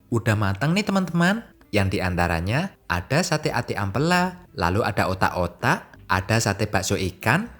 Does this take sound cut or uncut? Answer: cut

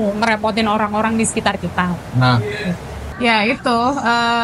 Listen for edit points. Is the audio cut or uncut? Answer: cut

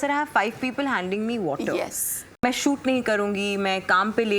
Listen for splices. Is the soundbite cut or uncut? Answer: cut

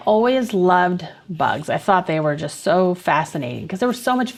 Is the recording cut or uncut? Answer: uncut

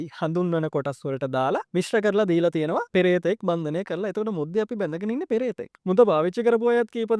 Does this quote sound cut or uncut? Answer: cut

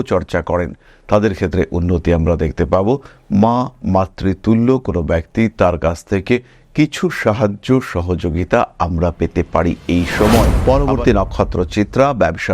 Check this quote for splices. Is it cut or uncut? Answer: cut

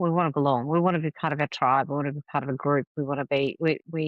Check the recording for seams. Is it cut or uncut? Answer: uncut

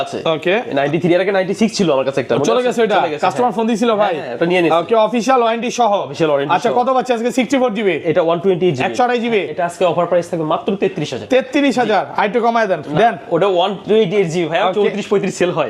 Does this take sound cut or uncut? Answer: uncut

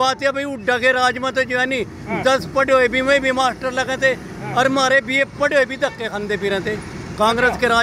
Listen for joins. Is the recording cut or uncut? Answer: uncut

